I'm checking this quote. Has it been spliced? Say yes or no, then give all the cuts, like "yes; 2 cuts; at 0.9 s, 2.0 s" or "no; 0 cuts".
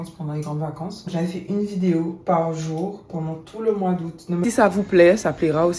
yes; 2 cuts; at 1.1 s, 4.4 s